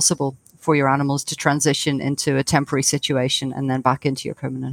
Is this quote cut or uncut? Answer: uncut